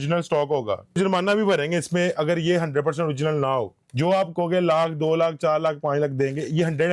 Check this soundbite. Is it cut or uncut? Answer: cut